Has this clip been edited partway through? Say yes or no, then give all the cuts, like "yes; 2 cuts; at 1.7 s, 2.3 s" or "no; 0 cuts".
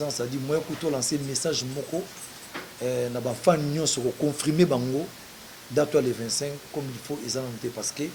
no; 0 cuts